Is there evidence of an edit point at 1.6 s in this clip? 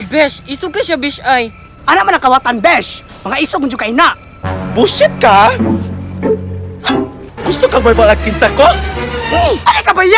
no; 0 cuts

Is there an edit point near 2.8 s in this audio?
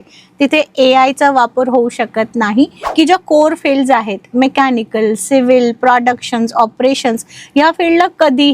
yes; 1 cut; at 2.8 s

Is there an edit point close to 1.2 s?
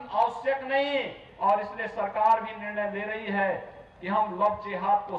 yes; 1 cut; at 1.2 s

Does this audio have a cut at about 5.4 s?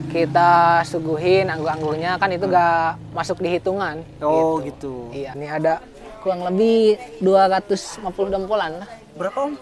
yes; 1 cut; at 5.4 s

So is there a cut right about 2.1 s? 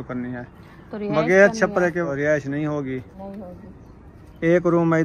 yes; 1 cut; at 2.1 s

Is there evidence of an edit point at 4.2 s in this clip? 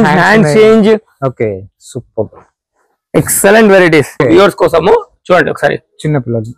yes; 1 cut; at 4.2 s

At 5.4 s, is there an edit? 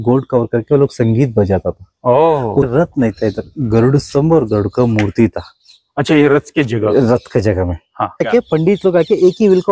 no; 2 cuts; at 2.7 s, 8.3 s

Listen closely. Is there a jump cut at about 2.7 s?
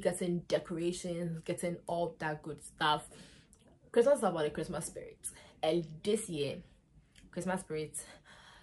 no; 0 cuts

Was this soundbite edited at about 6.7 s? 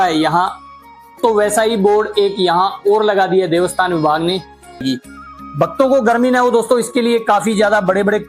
no; 2 cuts; at 1.2 s, 4.8 s

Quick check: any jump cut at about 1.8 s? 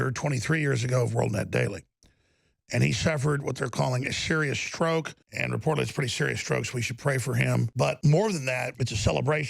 no; 3 cuts; at 5.2 s, 7.8 s, 8.7 s

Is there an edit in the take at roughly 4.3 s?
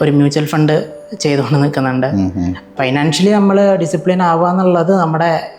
no; 1 cut; at 2.6 s

